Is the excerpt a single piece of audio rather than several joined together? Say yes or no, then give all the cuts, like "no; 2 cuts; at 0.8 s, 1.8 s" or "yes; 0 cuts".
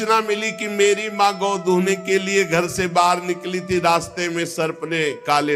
yes; 0 cuts